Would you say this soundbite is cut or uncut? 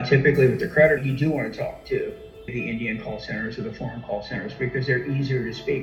cut